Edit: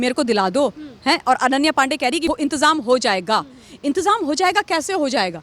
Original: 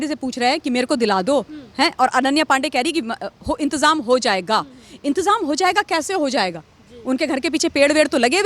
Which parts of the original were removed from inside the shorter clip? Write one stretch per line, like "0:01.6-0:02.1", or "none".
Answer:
0:03.0-0:03.4